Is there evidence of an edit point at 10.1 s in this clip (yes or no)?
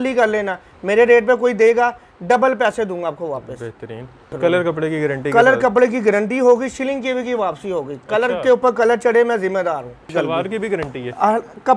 yes